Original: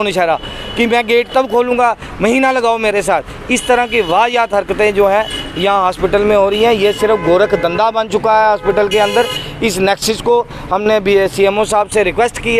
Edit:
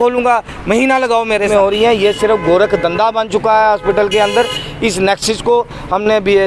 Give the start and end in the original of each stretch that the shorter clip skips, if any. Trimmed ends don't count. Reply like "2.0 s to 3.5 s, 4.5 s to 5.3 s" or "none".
3.0 s to 6.3 s